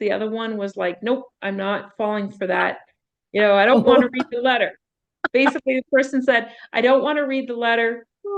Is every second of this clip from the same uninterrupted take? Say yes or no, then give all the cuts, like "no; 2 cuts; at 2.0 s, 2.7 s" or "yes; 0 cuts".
yes; 0 cuts